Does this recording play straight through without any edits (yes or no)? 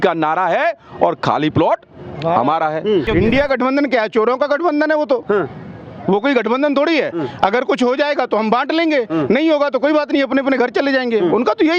no